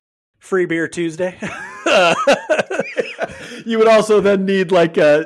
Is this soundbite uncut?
no; 1 cut; at 2.8 s

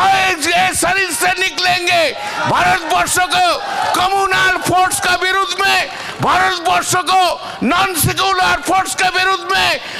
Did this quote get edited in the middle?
no; 0 cuts

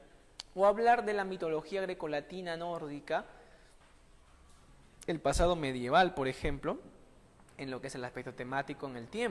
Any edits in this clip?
no; 0 cuts

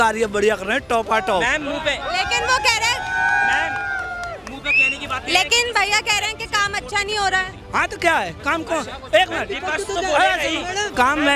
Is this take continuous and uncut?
yes; 0 cuts

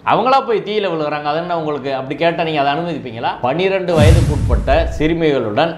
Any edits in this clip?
yes; 1 cut; at 3.4 s

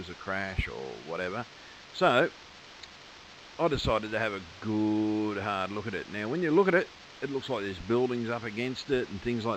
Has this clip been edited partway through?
yes; 1 cut; at 1.1 s

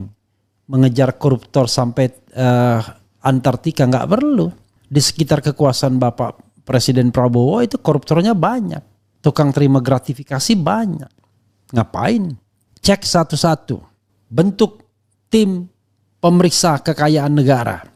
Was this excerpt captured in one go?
yes; 0 cuts

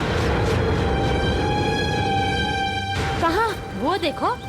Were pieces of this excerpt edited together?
no; 0 cuts

